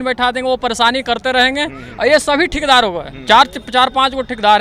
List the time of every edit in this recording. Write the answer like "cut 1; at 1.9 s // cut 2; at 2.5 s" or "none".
none